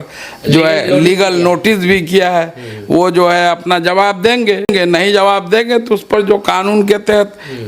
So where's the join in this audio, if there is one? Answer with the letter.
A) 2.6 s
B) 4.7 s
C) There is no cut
B